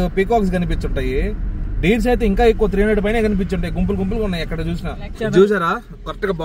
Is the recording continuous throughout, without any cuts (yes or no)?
yes